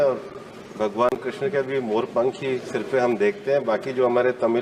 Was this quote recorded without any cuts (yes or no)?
yes